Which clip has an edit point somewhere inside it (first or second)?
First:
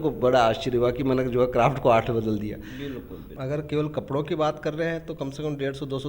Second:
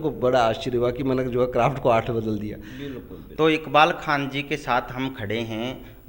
first